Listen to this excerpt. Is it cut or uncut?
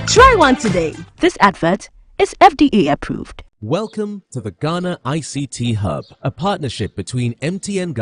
cut